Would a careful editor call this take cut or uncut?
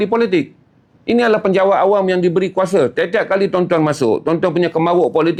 uncut